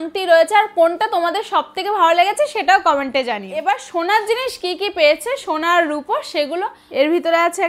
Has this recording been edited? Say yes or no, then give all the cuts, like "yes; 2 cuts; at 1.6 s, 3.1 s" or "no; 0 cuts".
yes; 2 cuts; at 3.6 s, 6.8 s